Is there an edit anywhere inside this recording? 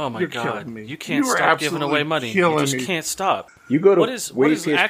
yes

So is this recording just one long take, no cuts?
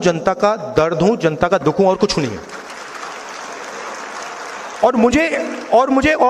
yes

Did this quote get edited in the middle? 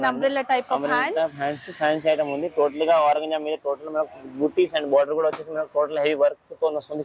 no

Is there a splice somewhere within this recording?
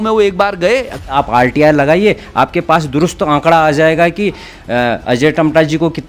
yes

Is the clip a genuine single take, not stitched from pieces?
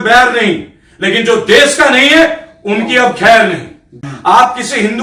no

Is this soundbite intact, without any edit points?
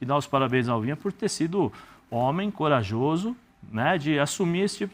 yes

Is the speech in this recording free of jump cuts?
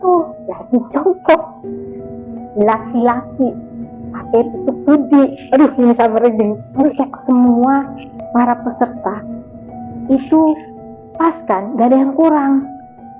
no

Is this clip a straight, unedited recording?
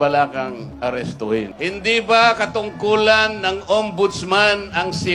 no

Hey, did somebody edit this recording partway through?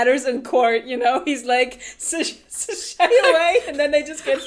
no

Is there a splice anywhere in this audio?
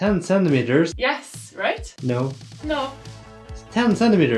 yes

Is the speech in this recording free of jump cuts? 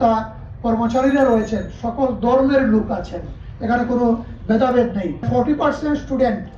no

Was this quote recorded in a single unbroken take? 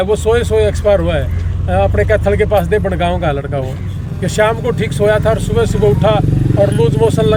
yes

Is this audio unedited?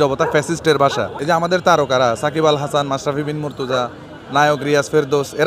no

